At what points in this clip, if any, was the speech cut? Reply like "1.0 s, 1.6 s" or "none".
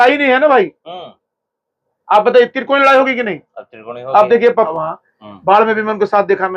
4.7 s